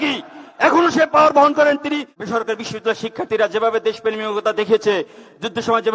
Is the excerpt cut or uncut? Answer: cut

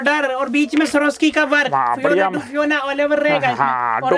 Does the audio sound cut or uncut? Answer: uncut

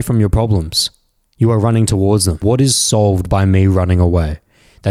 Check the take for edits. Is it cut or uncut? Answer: cut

